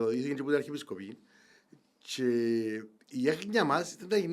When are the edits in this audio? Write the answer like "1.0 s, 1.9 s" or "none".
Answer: none